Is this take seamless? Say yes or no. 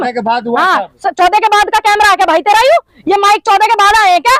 yes